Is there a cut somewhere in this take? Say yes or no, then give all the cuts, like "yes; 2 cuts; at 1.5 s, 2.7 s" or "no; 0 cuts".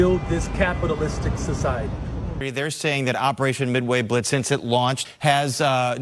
yes; 2 cuts; at 2.4 s, 5.0 s